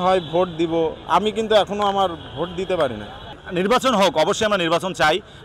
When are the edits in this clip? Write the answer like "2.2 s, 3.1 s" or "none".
3.4 s